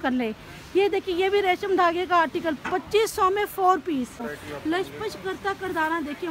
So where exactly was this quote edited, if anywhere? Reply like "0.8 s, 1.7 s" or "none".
4.3 s